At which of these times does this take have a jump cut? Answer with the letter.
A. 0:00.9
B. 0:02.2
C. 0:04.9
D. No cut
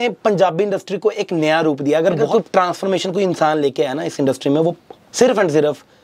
B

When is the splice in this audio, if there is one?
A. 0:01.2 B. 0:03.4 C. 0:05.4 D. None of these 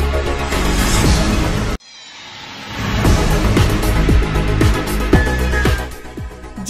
C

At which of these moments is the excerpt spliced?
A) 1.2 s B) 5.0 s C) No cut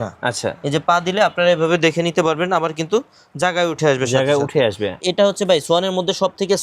B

